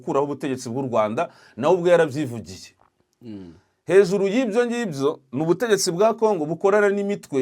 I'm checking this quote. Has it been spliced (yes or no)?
no